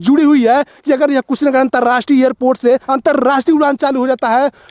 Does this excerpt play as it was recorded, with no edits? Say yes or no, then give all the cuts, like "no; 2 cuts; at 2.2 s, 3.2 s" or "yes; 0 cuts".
no; 1 cut; at 2.9 s